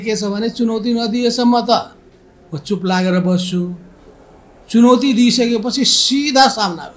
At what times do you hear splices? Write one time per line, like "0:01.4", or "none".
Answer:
none

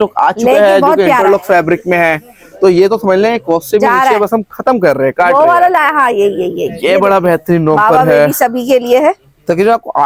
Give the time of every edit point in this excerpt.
none

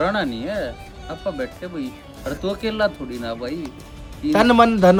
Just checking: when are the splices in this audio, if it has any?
none

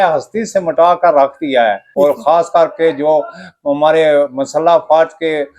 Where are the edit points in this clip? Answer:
0:01.8

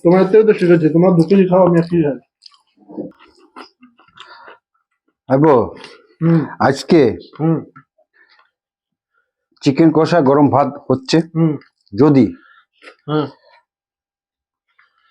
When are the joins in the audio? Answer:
0:03.2

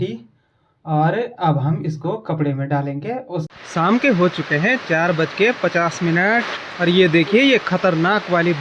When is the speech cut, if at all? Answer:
0:03.5

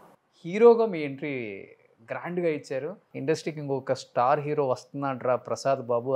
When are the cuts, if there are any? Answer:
0:03.1

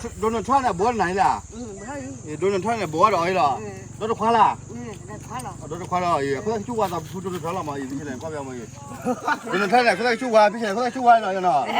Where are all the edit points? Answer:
none

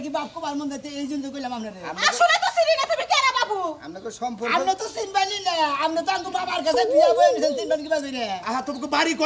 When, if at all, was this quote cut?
none

